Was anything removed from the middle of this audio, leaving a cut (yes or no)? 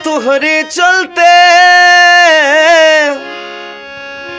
no